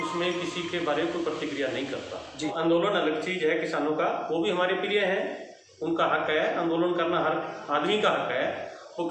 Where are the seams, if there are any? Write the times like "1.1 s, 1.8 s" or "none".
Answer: 2.5 s

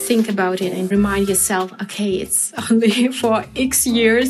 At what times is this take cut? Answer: 0.9 s

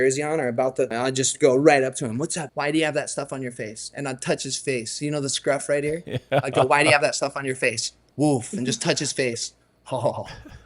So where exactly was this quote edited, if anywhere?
0.9 s, 2.4 s

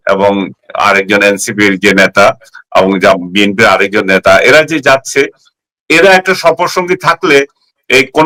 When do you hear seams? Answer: none

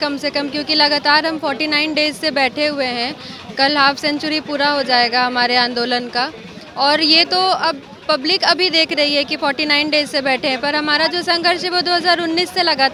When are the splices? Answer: none

